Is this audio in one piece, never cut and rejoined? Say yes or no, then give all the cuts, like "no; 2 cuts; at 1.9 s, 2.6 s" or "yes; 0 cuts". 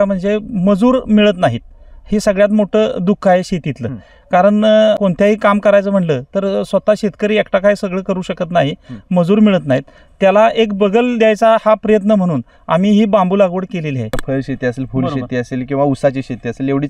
no; 2 cuts; at 5.0 s, 14.2 s